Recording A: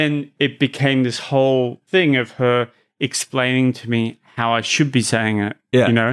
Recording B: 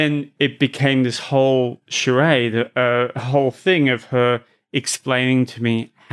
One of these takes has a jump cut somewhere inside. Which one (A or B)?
A